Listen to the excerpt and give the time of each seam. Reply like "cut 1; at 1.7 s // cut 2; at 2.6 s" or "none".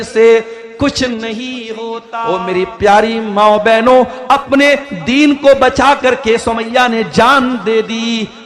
cut 1; at 2.1 s